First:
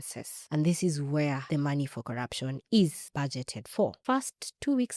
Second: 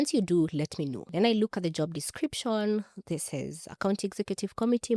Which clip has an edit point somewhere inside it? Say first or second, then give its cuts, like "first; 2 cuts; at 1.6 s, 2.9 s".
first; 1 cut; at 4.0 s